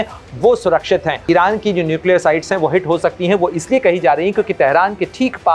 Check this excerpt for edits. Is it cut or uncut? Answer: cut